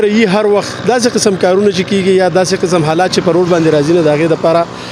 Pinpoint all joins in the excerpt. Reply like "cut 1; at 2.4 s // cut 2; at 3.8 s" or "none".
none